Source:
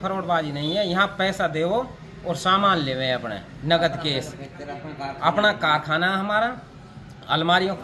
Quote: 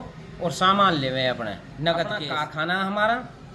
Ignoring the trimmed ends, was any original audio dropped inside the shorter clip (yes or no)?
yes